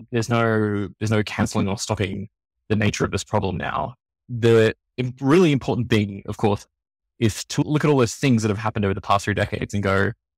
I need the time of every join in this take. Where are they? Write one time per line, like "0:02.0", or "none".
0:04.3
0:07.6